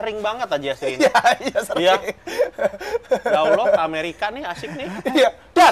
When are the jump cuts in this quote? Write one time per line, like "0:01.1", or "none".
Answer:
none

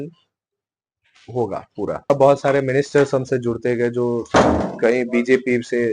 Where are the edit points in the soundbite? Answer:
0:02.1

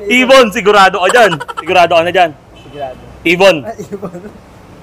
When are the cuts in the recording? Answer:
0:01.6

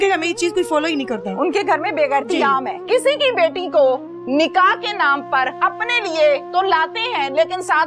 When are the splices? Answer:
0:02.8
0:05.6

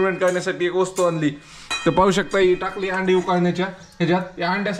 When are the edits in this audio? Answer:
none

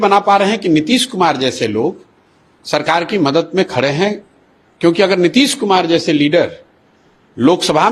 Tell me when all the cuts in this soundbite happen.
none

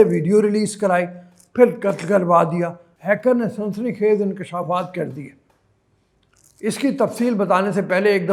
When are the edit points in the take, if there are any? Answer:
none

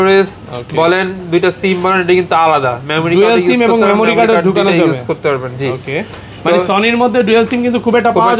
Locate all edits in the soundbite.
none

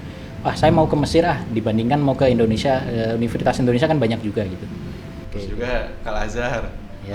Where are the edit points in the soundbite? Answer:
0:05.2

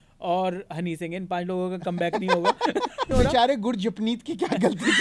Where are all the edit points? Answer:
0:03.1

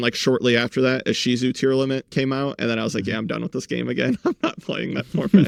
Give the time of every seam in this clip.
none

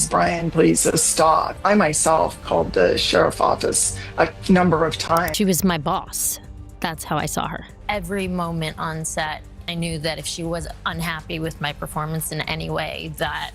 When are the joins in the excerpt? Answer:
0:05.3

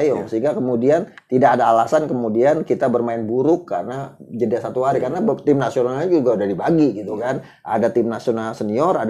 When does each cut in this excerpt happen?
none

